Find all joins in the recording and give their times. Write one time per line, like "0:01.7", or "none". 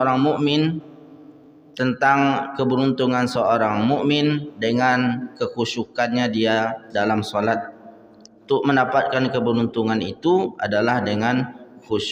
none